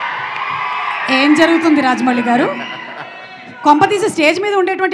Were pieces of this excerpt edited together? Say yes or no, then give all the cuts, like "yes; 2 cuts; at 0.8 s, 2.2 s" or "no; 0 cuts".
no; 0 cuts